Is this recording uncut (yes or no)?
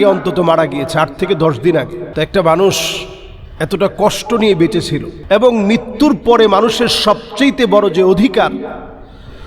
no